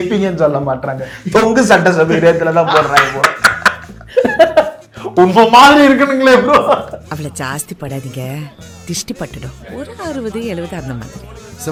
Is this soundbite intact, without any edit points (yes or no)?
yes